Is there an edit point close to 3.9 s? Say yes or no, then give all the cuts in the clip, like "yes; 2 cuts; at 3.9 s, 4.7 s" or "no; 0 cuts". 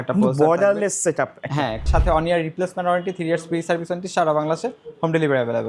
no; 1 cut; at 1.8 s